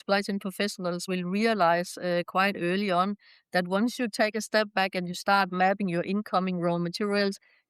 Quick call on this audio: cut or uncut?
cut